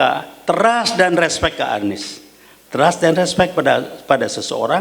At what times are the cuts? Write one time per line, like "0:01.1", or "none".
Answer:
none